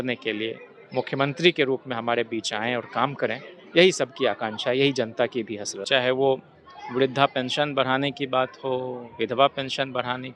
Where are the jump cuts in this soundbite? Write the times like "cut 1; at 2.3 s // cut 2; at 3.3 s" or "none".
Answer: cut 1; at 5.7 s